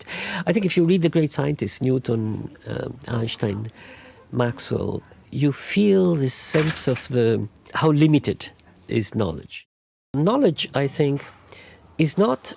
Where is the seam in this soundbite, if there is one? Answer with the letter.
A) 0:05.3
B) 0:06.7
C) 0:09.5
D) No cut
C